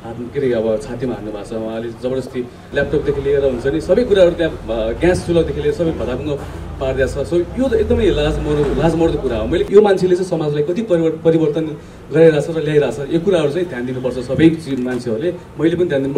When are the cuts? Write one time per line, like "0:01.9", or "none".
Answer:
0:02.6
0:09.7